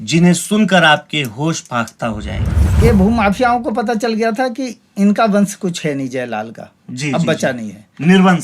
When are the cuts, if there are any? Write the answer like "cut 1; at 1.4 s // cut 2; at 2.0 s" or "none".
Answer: cut 1; at 2.8 s